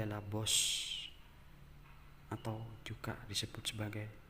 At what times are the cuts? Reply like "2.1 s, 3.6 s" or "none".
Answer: none

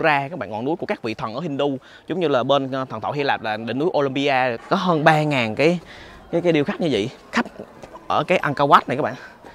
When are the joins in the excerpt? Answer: 4.6 s

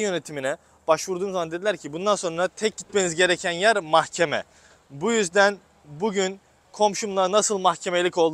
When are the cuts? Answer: none

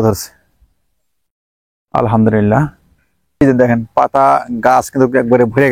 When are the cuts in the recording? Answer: 3.2 s

